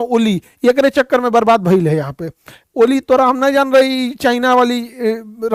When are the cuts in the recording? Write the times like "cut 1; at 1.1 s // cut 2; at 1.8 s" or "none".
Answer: none